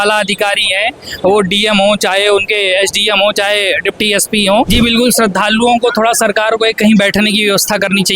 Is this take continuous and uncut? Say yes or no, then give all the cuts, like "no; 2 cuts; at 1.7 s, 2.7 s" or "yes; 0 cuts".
no; 1 cut; at 4.7 s